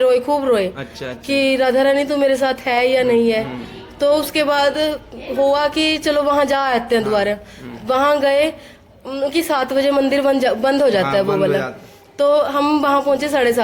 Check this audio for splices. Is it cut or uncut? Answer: uncut